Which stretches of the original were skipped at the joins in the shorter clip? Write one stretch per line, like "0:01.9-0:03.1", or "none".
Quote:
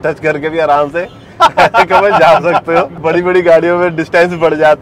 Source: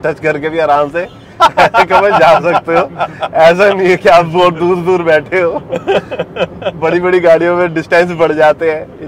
0:02.9-0:06.7